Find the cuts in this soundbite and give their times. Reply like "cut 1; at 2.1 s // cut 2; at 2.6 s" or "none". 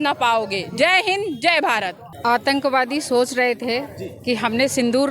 cut 1; at 2.0 s

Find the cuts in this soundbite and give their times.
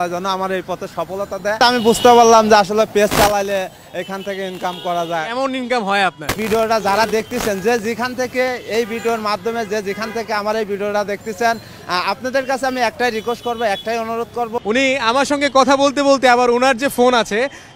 cut 1; at 1.6 s // cut 2; at 6.4 s // cut 3; at 14.5 s

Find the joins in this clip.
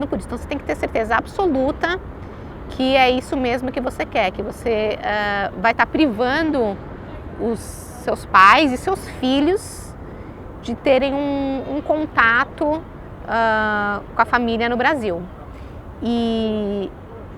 none

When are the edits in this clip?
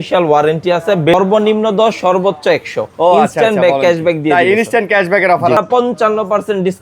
cut 1; at 1.1 s // cut 2; at 5.6 s

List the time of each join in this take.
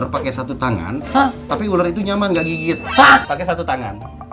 cut 1; at 3.2 s

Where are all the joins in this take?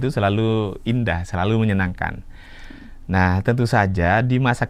none

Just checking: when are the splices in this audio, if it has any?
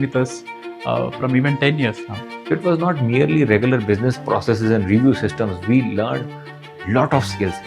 cut 1; at 2.3 s

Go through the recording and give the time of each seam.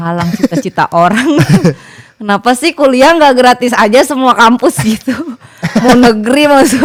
none

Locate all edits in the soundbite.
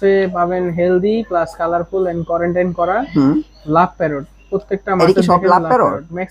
none

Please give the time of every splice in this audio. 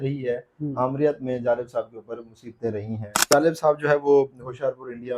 cut 1; at 3.3 s

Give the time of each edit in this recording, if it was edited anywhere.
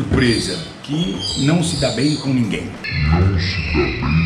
none

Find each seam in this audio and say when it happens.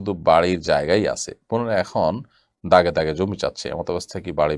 none

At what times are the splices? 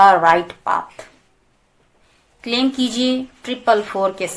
none

